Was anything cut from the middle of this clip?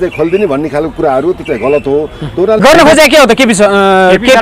yes; 1 cut; at 2.6 s

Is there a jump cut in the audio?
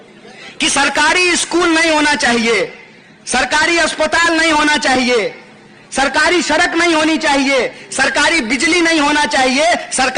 no; 0 cuts

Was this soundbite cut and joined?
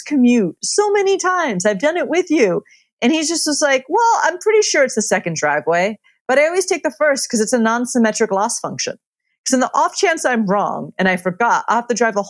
no; 0 cuts

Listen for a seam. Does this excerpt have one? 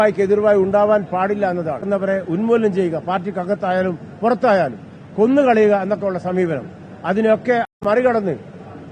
yes; 2 cuts; at 1.8 s, 7.8 s

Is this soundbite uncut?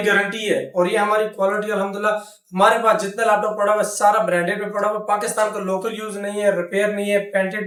yes; 0 cuts

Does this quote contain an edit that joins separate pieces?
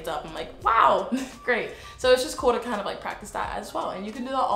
no; 0 cuts

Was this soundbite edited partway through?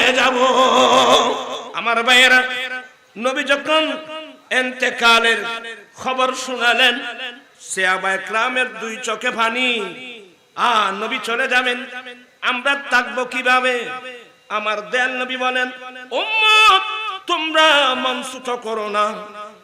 yes; 1 cut; at 1.7 s

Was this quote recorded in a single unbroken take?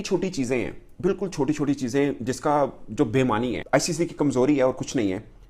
no; 1 cut; at 3.6 s

